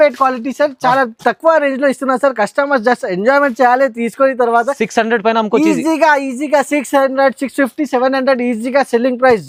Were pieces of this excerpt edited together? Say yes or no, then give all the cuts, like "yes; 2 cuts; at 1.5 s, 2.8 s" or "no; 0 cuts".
no; 0 cuts